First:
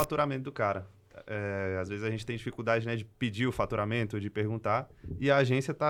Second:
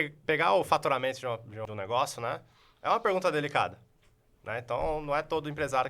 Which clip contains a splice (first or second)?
second